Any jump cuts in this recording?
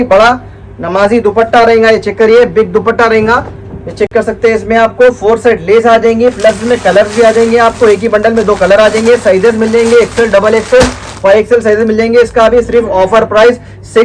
no; 0 cuts

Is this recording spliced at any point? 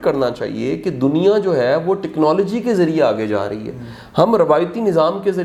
no; 0 cuts

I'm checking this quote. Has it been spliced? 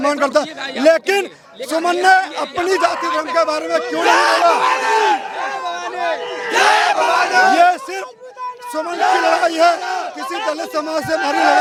no; 0 cuts

